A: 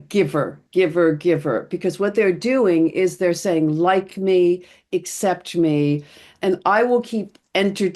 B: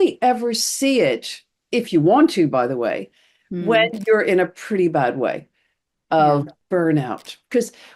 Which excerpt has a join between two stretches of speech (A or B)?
B